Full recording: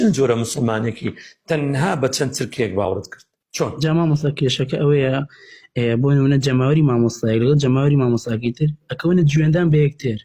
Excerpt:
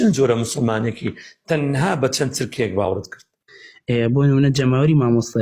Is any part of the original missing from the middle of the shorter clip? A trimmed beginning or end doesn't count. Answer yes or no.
yes